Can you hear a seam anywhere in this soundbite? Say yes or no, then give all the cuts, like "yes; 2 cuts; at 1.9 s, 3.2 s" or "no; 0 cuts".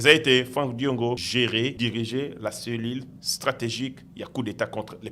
yes; 1 cut; at 1.6 s